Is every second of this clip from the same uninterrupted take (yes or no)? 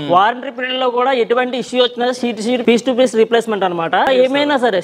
no